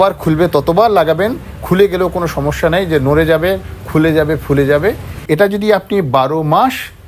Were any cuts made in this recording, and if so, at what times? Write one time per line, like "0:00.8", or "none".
0:05.1